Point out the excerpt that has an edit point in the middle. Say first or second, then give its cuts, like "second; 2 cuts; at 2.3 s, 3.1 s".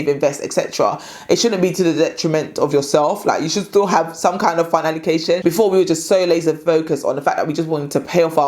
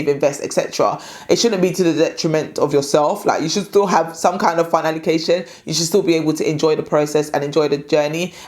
first; 1 cut; at 5.4 s